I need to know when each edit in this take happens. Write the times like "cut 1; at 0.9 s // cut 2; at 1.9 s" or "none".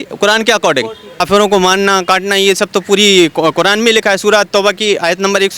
cut 1; at 1.2 s